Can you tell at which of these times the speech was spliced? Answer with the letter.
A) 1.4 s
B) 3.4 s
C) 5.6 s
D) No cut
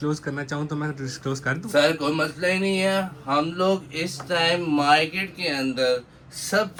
D